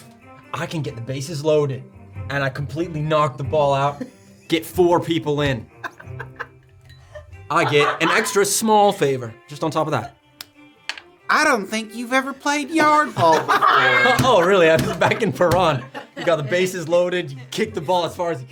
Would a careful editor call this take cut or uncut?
uncut